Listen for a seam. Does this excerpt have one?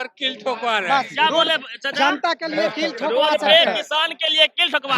no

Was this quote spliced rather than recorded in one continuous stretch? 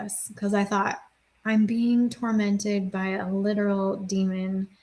no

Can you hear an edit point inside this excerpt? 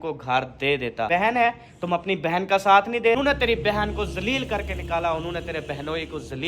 yes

